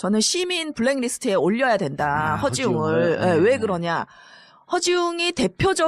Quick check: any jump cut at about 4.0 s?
no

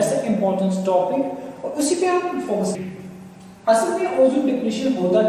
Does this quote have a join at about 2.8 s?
yes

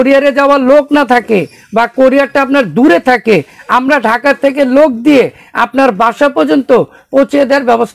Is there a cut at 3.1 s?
no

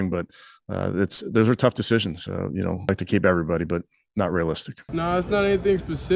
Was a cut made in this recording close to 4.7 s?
yes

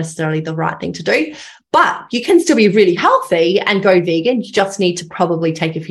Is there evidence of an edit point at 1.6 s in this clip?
no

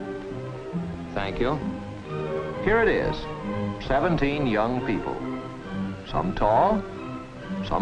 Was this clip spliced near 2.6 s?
no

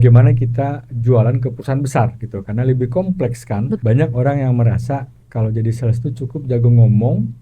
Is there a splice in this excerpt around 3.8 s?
yes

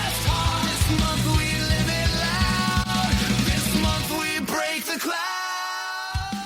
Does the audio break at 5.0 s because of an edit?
no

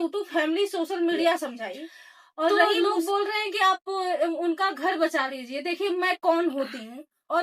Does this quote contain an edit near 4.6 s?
no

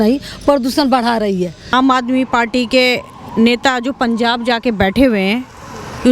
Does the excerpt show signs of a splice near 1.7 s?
yes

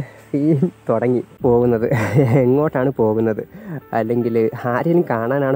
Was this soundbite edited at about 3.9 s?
no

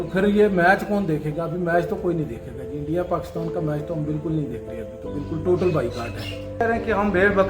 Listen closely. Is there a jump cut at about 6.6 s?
yes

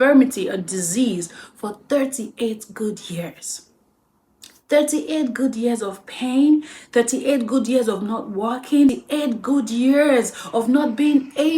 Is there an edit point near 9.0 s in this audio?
yes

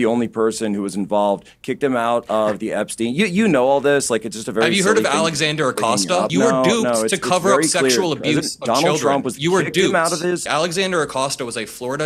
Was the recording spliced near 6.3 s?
yes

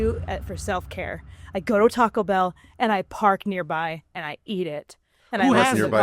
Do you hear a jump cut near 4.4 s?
no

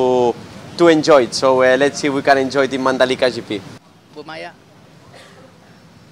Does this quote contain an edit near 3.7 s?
yes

